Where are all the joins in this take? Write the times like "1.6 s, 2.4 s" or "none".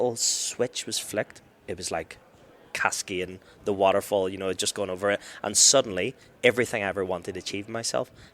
1.5 s